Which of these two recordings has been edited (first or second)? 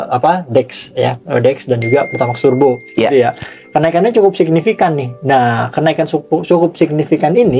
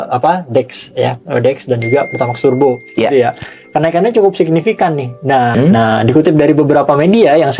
second